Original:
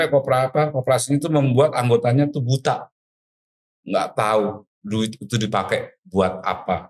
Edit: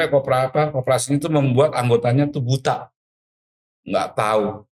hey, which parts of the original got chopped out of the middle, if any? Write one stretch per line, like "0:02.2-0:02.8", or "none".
none